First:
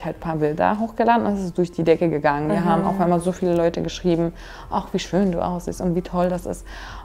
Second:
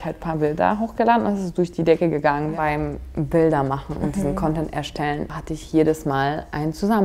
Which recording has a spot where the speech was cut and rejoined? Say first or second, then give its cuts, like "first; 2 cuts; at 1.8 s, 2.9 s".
second; 2 cuts; at 2.5 s, 5.3 s